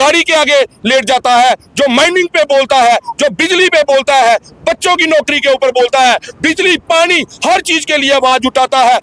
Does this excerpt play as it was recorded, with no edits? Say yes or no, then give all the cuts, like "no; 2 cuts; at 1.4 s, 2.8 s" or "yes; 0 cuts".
yes; 0 cuts